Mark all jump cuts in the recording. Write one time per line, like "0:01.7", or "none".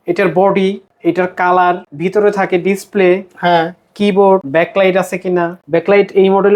0:00.9
0:01.9
0:04.5
0:05.6